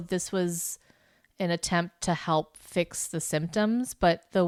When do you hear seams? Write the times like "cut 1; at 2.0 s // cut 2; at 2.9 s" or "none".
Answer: none